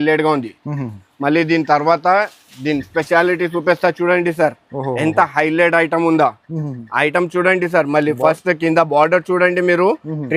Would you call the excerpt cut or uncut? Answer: uncut